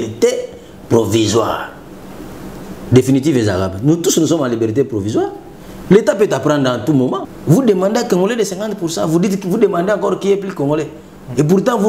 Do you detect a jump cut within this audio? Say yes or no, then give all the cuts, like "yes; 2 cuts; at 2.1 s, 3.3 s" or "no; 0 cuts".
yes; 1 cut; at 7.3 s